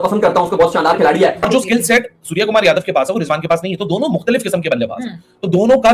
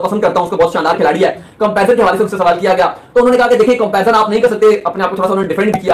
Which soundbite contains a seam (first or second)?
first